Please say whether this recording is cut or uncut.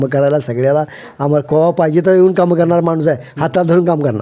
uncut